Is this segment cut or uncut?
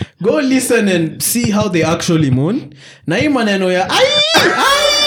uncut